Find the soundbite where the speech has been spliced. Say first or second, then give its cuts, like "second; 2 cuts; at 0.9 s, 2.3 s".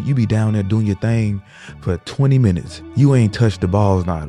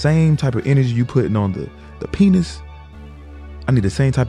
first; 1 cut; at 2.8 s